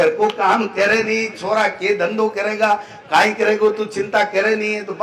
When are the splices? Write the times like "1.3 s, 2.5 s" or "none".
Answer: none